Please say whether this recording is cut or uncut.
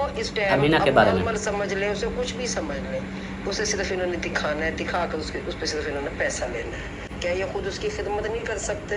uncut